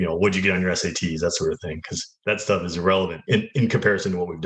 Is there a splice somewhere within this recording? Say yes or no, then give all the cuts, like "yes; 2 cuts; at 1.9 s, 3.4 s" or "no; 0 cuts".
yes; 1 cut; at 3.2 s